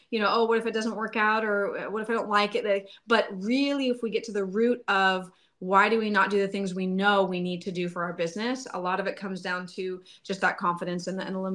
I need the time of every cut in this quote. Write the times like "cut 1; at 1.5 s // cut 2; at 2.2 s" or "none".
none